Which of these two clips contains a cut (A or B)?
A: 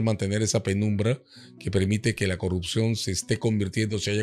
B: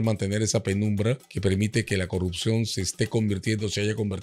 B